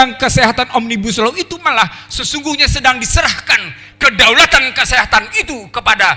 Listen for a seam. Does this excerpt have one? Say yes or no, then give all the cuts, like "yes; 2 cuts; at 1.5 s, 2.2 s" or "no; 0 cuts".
no; 0 cuts